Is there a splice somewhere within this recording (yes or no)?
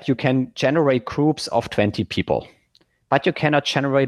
no